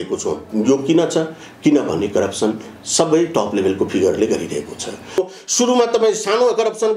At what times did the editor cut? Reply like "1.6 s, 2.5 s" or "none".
5.2 s